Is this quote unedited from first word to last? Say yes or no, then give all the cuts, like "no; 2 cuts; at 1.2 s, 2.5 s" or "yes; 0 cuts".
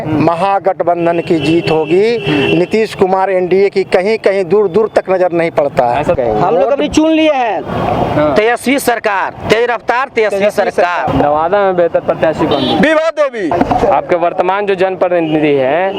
no; 3 cuts; at 6.2 s, 11.1 s, 13.5 s